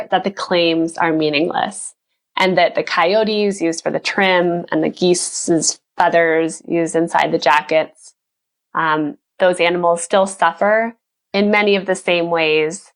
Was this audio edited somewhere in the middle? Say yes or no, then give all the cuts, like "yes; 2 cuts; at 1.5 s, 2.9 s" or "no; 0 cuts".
no; 0 cuts